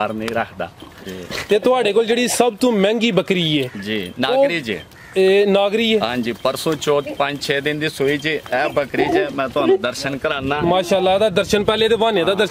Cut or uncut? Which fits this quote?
uncut